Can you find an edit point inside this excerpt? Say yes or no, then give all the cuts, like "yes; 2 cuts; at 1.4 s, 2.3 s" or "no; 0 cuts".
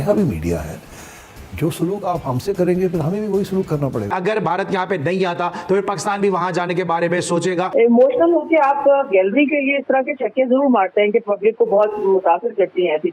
yes; 2 cuts; at 4.1 s, 7.7 s